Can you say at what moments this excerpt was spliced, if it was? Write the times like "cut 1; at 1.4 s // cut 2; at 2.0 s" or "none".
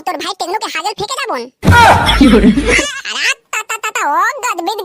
cut 1; at 2.8 s